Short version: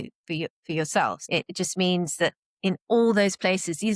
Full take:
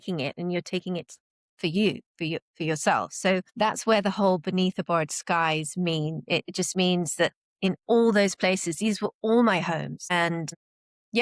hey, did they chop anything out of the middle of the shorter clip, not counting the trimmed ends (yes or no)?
yes